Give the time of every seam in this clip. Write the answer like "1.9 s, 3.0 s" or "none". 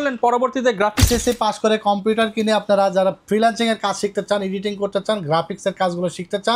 1.0 s